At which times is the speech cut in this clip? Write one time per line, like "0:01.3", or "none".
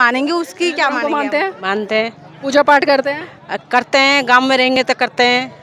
0:01.0